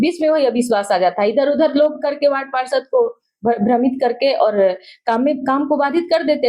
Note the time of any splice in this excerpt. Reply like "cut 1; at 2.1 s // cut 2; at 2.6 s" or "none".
none